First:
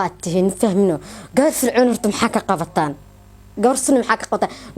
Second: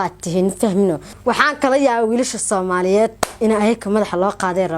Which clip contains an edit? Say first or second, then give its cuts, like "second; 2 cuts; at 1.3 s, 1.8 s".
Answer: second; 1 cut; at 1.1 s